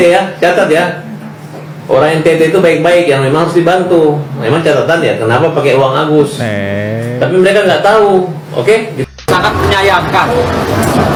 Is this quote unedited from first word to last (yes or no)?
yes